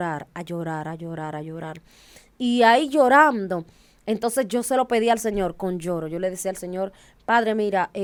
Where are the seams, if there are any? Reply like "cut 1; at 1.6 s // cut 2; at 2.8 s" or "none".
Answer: none